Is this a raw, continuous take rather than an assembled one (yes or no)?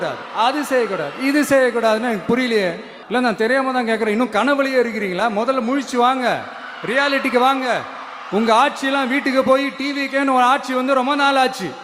no